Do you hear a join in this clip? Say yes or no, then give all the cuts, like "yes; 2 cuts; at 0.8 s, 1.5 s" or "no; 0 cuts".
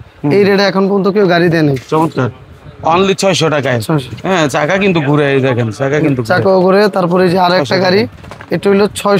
no; 0 cuts